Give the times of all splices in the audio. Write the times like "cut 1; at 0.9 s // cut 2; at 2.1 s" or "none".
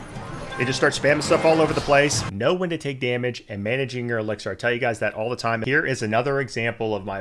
cut 1; at 2.2 s // cut 2; at 5.6 s